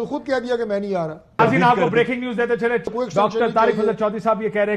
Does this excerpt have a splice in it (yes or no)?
yes